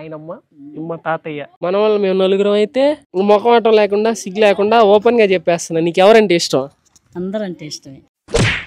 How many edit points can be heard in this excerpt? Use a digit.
1